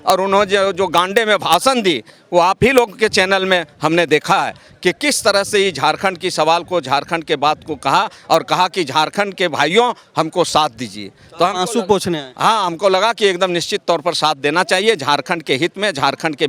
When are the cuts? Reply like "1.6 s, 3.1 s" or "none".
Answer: none